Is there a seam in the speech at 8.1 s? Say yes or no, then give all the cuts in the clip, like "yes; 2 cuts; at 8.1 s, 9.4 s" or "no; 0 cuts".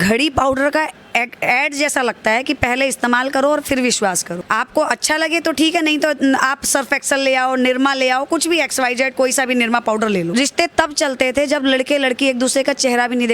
no; 1 cut; at 10.3 s